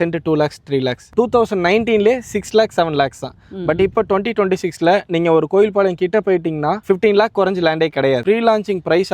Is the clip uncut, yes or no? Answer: no